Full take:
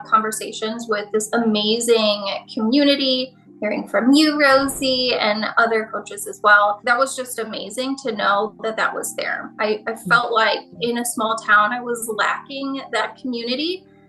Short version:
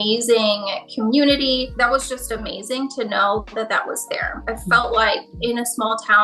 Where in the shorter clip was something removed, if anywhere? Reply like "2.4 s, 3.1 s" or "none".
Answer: 1.7 s, 4.4 s